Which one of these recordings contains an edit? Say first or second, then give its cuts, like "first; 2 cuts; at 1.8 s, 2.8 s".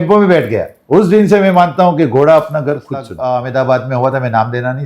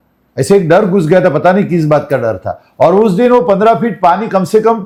first; 1 cut; at 3.1 s